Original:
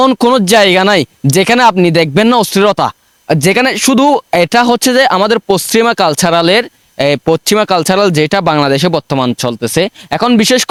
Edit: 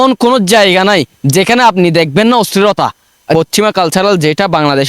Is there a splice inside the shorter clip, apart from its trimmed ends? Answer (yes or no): yes